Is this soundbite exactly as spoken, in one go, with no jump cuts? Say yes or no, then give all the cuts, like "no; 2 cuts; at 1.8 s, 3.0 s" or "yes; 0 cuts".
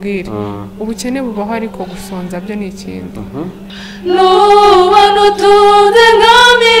no; 1 cut; at 3.7 s